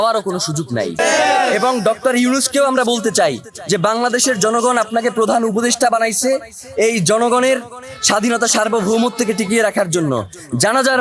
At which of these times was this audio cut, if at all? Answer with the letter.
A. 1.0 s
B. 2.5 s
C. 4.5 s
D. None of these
A